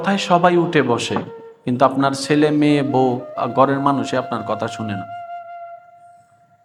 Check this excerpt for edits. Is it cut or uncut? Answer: uncut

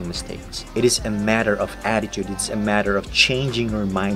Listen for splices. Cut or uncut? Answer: uncut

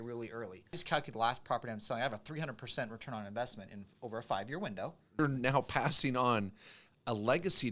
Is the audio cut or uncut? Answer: cut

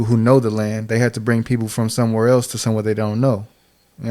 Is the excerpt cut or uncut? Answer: uncut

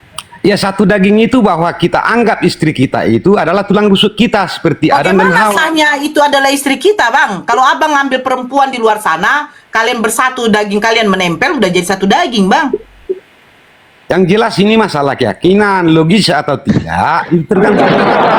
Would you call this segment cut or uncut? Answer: uncut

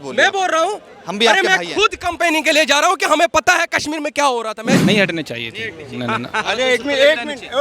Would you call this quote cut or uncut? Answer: cut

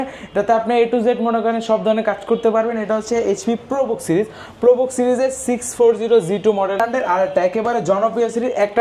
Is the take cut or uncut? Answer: cut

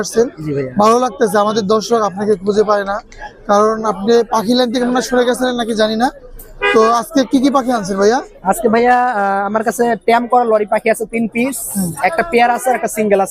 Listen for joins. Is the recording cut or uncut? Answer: uncut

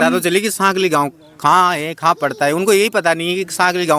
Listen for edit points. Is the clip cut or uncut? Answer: uncut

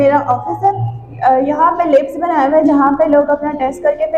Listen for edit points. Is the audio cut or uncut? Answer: uncut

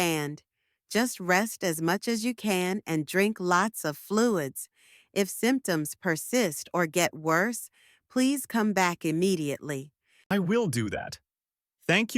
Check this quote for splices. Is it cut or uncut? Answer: cut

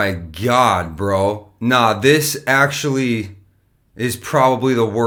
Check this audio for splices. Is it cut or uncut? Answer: uncut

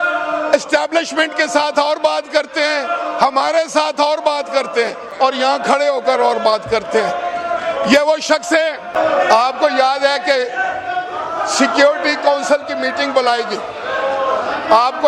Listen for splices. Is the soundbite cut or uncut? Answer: uncut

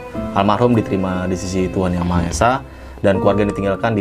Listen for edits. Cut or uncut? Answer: uncut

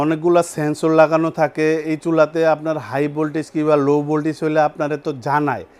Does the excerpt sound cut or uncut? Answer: uncut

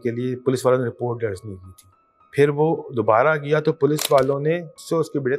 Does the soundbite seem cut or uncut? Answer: uncut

